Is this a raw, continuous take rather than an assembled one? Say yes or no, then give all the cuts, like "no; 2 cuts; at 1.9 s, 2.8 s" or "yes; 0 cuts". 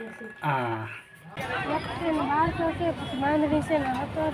no; 1 cut; at 1.4 s